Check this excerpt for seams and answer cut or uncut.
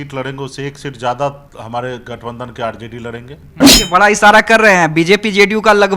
cut